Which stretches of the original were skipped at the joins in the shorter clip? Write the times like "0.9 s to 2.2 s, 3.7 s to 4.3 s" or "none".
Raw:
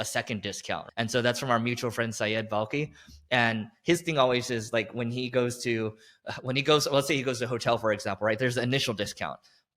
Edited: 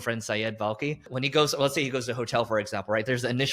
3.0 s to 6.4 s